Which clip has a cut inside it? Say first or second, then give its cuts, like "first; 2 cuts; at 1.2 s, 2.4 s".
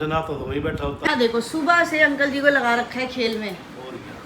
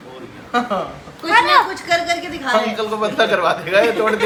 first; 1 cut; at 1.1 s